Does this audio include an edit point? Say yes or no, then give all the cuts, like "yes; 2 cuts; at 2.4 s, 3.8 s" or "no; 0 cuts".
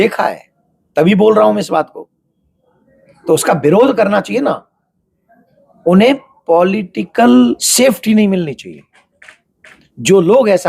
yes; 1 cut; at 7.6 s